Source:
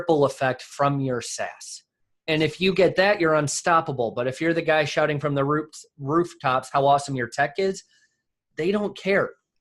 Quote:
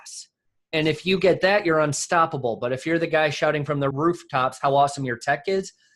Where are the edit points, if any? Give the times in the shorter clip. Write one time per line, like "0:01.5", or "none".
0:03.9

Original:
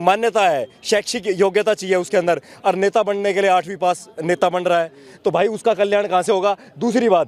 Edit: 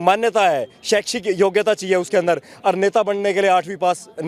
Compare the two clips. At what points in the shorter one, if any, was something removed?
none

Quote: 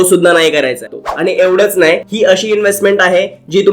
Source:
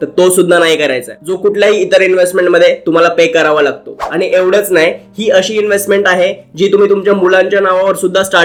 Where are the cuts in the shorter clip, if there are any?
0:00.9
0:02.1

